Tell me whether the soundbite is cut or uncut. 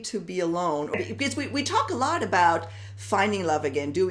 cut